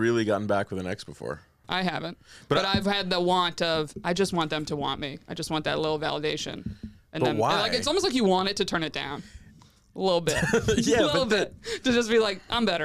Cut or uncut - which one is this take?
cut